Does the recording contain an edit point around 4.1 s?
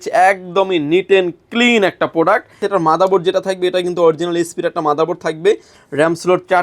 no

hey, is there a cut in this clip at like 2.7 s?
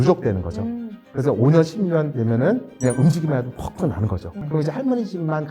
yes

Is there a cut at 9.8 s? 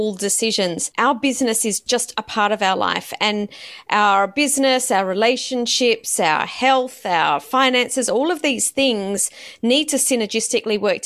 no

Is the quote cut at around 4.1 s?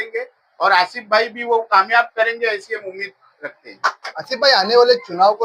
yes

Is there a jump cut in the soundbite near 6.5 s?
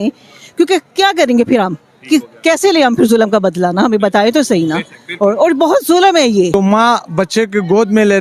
yes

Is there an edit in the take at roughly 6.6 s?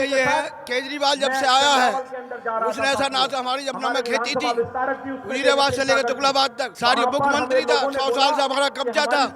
yes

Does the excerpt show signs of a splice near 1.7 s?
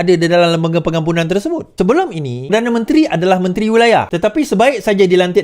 yes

